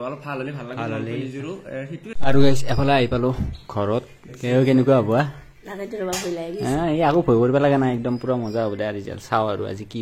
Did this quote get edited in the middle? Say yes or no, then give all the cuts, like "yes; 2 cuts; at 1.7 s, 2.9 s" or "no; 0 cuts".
yes; 1 cut; at 2.2 s